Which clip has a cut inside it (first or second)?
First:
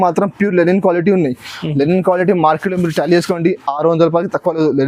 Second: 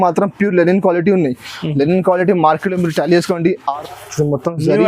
second